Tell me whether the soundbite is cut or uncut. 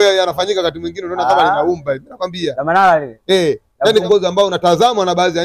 cut